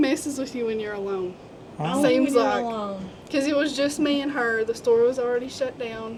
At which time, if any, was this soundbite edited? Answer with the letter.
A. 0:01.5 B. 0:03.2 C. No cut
C